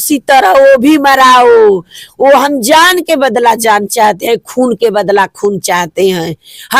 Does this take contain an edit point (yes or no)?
no